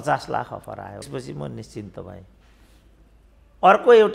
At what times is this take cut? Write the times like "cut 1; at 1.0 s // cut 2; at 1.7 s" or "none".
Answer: cut 1; at 1.0 s